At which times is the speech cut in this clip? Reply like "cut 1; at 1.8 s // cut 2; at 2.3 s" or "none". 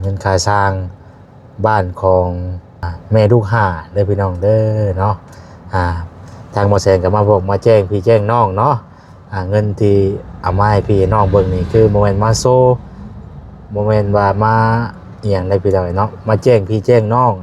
cut 1; at 2.9 s